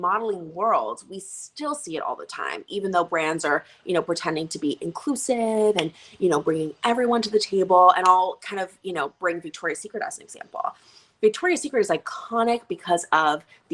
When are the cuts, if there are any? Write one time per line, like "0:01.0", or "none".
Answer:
none

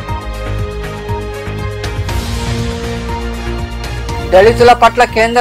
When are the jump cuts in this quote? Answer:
0:01.9

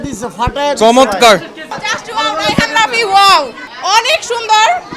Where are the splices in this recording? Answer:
0:01.7
0:03.6

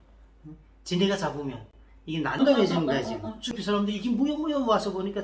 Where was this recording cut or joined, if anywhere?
0:02.3
0:03.5

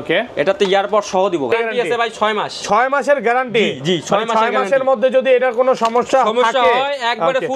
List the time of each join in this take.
0:01.5

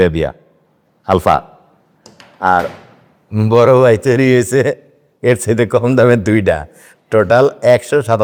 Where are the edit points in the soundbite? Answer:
none

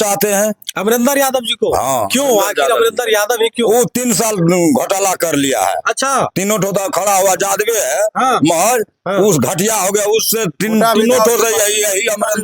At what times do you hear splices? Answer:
none

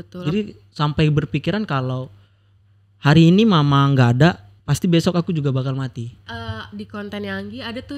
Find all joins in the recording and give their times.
0:06.2

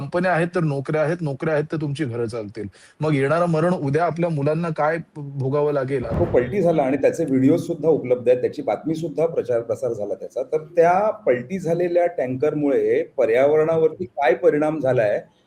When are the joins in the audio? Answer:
0:06.1

